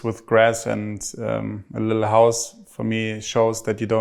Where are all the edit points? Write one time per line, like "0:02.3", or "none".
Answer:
none